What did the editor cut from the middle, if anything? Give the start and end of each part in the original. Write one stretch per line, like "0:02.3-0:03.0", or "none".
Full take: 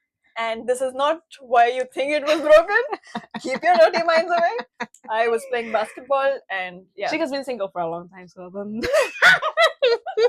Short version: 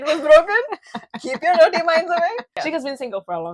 0:04.7-0:06.9